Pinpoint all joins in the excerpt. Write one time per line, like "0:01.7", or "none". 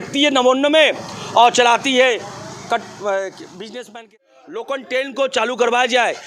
0:03.9